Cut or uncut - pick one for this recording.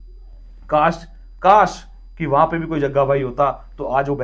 uncut